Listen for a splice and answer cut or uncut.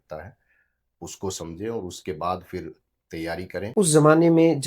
cut